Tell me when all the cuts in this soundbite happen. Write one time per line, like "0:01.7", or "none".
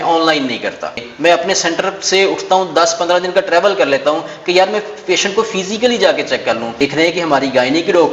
0:01.0
0:06.8